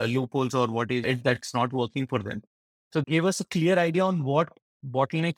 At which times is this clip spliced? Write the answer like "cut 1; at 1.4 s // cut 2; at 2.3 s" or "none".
cut 1; at 3.0 s